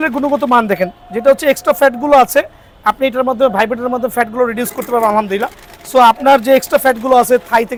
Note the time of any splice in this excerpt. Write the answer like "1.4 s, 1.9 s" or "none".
none